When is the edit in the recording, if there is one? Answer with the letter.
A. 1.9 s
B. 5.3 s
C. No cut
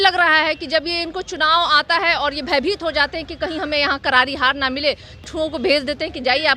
B